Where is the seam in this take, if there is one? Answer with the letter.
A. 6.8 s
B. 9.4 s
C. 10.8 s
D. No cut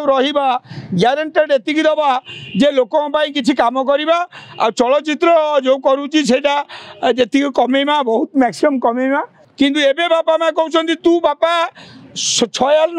B